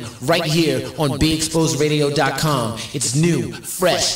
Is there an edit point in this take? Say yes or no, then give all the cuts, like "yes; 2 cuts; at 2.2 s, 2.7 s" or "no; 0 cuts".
no; 0 cuts